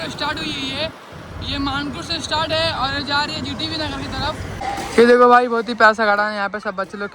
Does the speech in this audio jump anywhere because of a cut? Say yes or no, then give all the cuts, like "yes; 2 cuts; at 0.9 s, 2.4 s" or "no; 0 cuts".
yes; 1 cut; at 4.5 s